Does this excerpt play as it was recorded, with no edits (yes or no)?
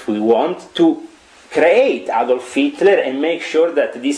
yes